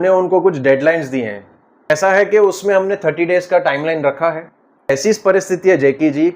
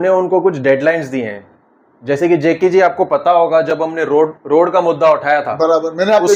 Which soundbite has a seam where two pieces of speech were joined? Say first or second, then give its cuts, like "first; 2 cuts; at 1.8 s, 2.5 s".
first; 2 cuts; at 1.9 s, 4.9 s